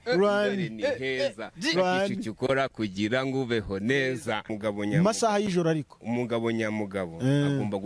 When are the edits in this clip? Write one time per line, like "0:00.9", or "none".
0:04.5